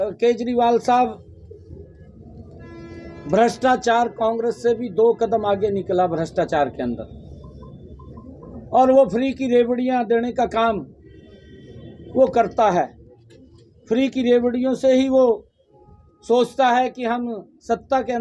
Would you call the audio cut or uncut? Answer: uncut